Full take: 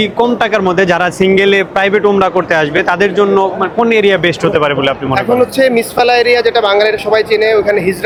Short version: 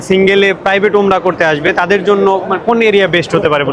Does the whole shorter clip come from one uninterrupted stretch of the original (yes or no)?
yes